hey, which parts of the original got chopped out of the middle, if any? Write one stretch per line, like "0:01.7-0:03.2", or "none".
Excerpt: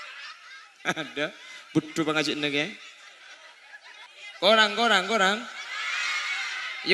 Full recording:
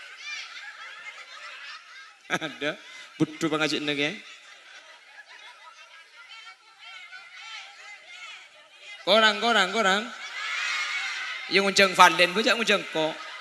0:05.5-0:08.7

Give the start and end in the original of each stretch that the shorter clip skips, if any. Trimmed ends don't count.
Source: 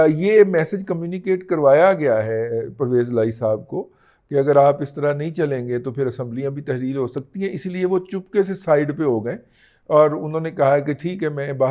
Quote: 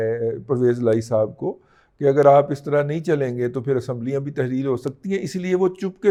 none

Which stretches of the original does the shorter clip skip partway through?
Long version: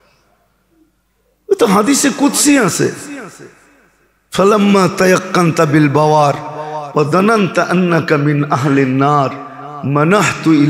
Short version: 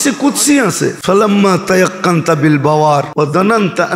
0:03.0-0:04.3
0:06.4-0:06.9

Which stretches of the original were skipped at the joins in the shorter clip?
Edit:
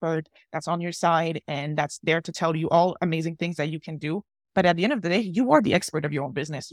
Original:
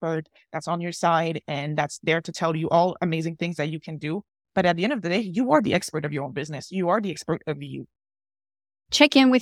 none

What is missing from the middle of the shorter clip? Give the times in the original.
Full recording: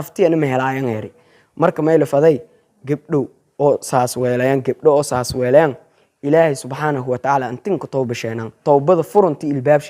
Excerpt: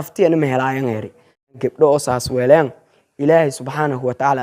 0:01.6-0:04.6

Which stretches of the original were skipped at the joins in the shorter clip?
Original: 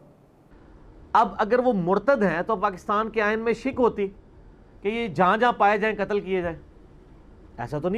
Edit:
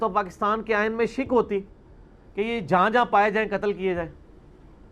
none

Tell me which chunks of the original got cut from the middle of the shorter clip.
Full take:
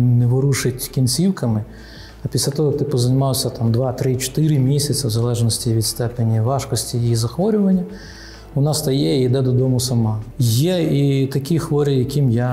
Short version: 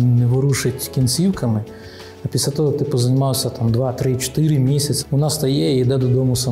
0:05.0-0:08.4

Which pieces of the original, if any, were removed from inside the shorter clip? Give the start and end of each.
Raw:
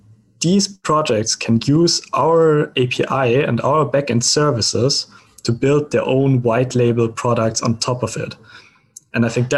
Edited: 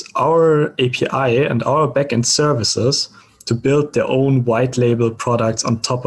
none

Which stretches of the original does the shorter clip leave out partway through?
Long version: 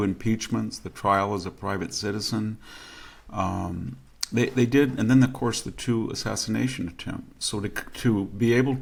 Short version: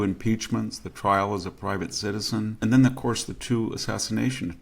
0:02.6-0:04.9

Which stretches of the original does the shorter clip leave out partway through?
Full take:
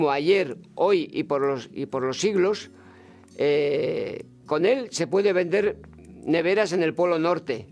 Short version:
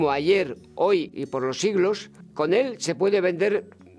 0:01.1-0:01.7
0:02.8-0:04.3

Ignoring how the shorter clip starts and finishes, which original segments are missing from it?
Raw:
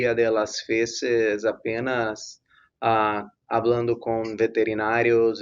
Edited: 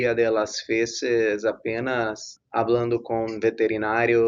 0:02.4-0:03.3

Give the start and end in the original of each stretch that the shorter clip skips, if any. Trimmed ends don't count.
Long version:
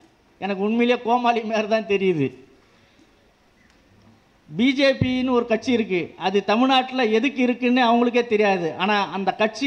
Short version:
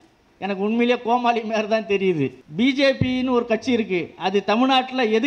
0:02.4-0:04.4

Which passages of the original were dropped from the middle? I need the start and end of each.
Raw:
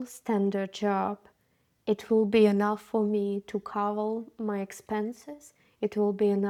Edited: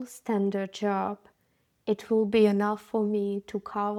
none

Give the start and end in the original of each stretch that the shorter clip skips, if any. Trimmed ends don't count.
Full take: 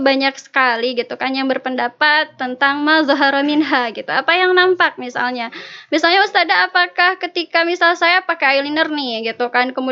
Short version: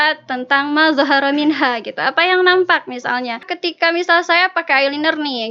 0:05.7-0:07.3

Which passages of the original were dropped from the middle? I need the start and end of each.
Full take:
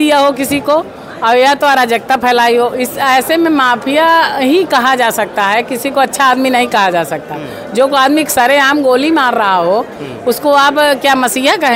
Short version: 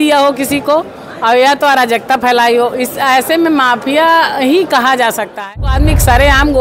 0:05.7-0:08.0

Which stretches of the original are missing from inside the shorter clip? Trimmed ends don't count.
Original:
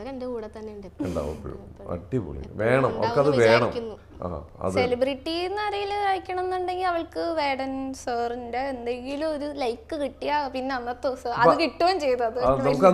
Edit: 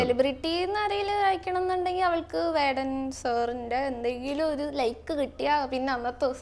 none

